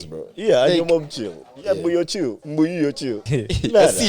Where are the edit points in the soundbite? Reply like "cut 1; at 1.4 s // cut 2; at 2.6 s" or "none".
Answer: cut 1; at 2.4 s // cut 2; at 3.2 s